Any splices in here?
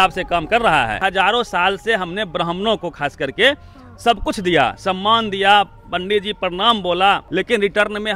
yes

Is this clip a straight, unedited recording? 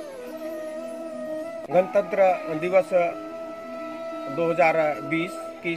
no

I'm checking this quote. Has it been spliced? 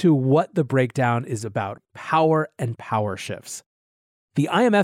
yes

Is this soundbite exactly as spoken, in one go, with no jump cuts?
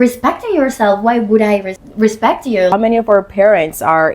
no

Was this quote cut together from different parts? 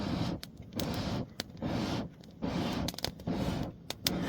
no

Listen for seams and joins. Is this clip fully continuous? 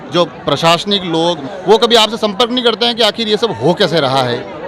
no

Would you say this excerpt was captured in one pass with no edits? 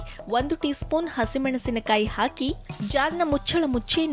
yes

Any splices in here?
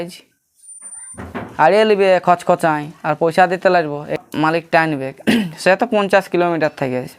yes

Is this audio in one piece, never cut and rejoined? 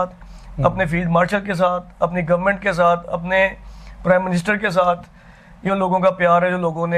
yes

